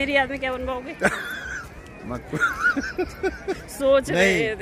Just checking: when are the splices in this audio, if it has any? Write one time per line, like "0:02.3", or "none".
none